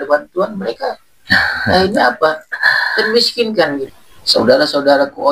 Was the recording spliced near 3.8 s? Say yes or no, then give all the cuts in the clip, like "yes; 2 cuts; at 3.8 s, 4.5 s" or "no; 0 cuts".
yes; 1 cut; at 3.8 s